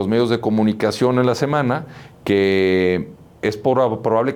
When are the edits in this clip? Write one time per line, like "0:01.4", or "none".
none

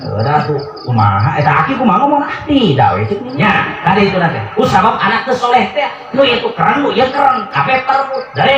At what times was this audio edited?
0:03.3

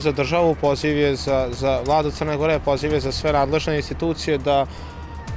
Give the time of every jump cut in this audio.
none

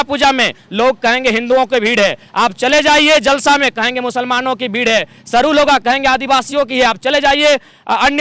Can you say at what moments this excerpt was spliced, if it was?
none

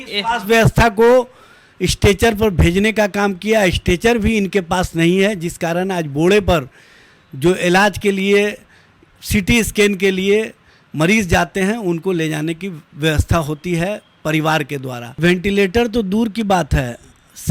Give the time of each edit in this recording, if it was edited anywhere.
0:15.2

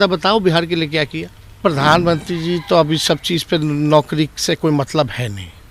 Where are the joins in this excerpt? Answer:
0:01.6

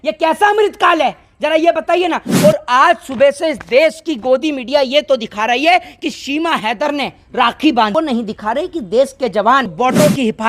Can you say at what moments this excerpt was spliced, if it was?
0:07.9
0:09.7

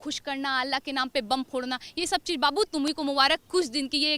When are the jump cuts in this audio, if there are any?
none

